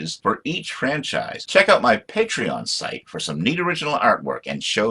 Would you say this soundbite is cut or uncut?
cut